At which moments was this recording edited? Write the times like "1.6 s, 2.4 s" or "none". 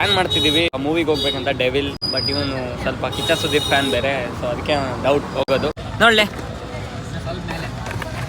0.8 s, 2.0 s, 5.8 s